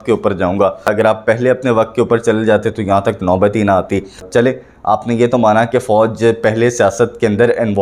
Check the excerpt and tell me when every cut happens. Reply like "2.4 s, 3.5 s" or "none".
0.9 s, 4.3 s